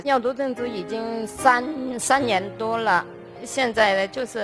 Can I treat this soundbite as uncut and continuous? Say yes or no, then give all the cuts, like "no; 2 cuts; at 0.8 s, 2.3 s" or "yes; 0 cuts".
no; 1 cut; at 3.3 s